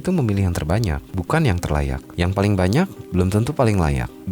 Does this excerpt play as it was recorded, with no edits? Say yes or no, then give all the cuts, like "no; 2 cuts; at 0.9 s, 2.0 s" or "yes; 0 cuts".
no; 2 cuts; at 1.1 s, 2.0 s